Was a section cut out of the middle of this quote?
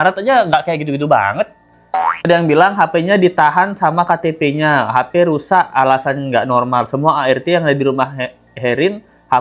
no; 0 cuts

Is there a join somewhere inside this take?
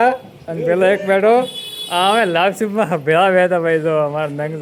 no; 0 cuts

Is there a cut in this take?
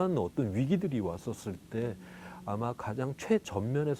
no; 0 cuts

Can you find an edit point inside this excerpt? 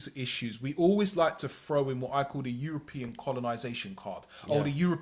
no; 0 cuts

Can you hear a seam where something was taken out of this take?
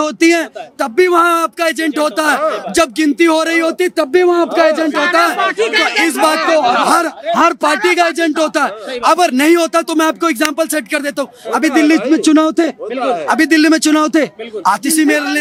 no; 0 cuts

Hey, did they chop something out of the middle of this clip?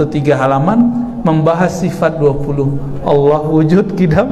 no; 0 cuts

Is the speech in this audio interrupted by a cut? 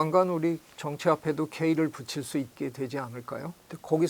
yes; 1 cut; at 2.5 s

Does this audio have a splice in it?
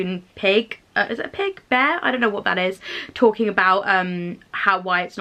no; 0 cuts

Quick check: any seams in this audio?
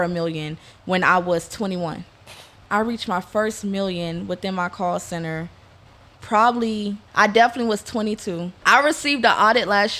yes; 3 cuts; at 2.6 s, 7.0 s, 8.6 s

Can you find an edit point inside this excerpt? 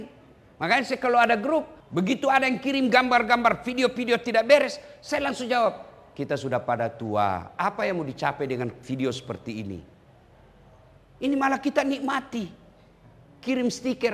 yes; 1 cut; at 1.8 s

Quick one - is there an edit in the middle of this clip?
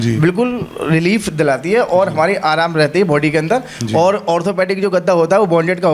no; 0 cuts

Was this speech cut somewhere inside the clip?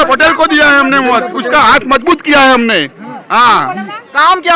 no; 0 cuts

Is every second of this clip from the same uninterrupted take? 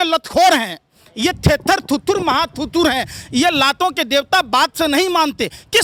yes; 0 cuts

